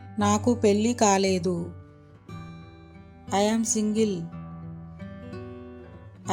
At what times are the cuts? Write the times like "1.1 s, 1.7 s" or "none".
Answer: none